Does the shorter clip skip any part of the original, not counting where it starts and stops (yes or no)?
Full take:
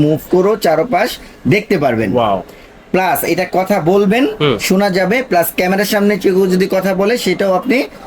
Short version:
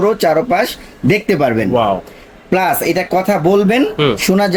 no